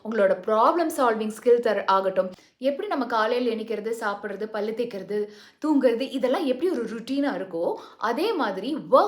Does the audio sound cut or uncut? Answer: cut